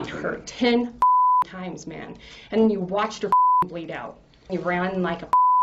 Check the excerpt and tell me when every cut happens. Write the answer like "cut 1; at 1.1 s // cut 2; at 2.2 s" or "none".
cut 1; at 4.5 s